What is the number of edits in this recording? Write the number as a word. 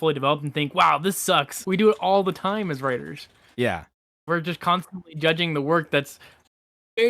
one